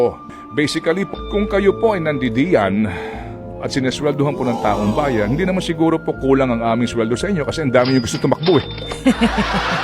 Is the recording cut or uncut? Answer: cut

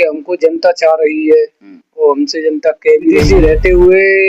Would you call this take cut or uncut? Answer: cut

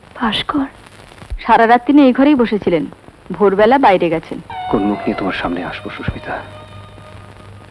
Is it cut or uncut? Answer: cut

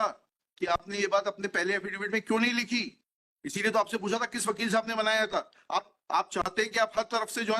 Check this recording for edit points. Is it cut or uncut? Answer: uncut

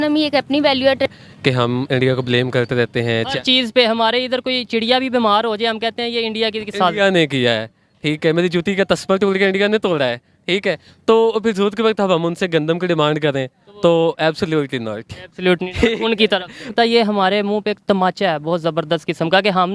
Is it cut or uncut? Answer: cut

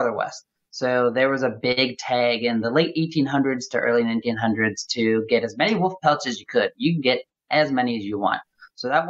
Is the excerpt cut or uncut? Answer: uncut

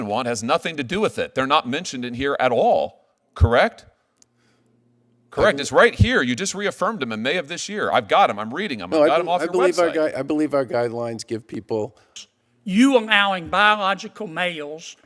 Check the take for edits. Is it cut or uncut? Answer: cut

